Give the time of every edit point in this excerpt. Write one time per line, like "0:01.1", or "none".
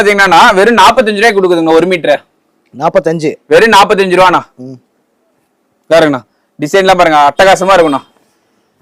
none